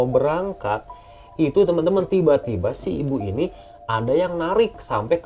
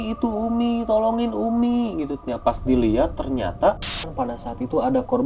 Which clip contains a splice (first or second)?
second